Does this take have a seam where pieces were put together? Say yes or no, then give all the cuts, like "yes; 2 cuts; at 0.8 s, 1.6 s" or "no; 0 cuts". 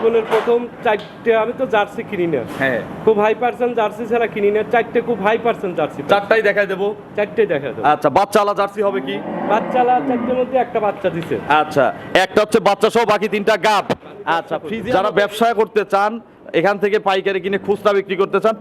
yes; 1 cut; at 14.7 s